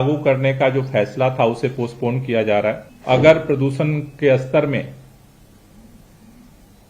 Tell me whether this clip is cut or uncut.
cut